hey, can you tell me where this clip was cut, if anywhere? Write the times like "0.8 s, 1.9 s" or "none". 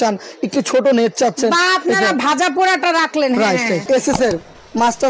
3.8 s